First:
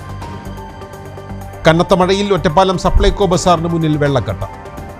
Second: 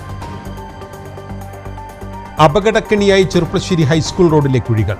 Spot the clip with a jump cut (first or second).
second